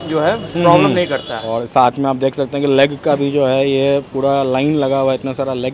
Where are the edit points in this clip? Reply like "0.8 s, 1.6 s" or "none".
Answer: 1.3 s